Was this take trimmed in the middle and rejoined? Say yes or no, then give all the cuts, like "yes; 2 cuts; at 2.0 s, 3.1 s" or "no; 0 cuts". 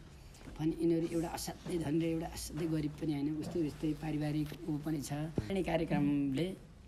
yes; 1 cut; at 5.5 s